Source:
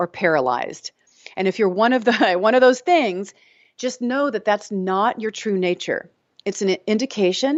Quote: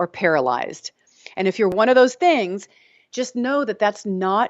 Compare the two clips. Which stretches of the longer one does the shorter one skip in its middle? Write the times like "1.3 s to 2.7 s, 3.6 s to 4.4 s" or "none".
1.7 s to 2.4 s